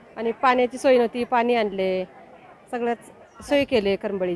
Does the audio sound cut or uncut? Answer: uncut